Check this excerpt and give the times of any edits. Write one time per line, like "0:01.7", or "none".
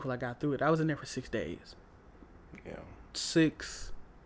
0:02.0